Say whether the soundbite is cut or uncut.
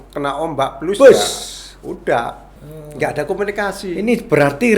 cut